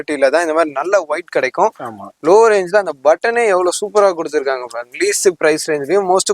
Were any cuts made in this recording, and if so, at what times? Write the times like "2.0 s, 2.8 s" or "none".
none